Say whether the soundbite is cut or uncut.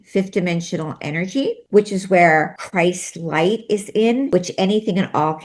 cut